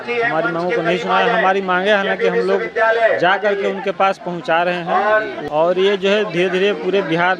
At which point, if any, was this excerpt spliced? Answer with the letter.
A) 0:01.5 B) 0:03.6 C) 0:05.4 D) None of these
C